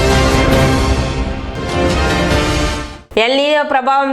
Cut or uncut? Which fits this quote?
cut